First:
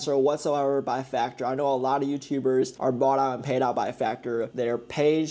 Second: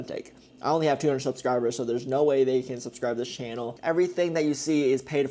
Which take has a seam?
first; 2 cuts; at 2.7 s, 4.5 s

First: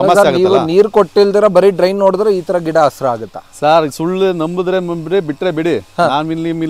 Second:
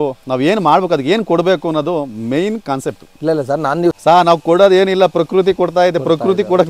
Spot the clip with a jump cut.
second; 1 cut; at 4.0 s

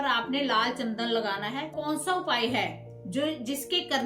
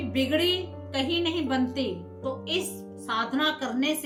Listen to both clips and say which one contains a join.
first; 1 cut; at 1.7 s

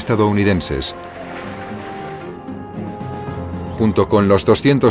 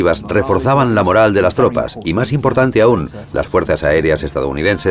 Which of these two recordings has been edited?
second; 1 cut; at 1.2 s

